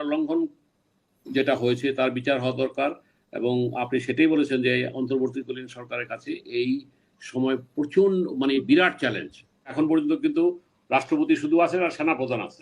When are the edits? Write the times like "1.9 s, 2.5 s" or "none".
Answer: 9.7 s